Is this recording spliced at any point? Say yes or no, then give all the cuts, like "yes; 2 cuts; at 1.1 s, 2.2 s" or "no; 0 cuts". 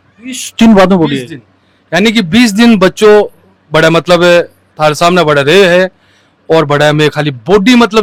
no; 0 cuts